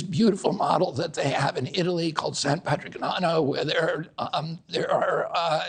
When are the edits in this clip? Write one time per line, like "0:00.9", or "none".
none